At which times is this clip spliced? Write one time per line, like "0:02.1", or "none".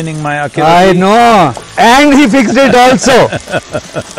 0:01.6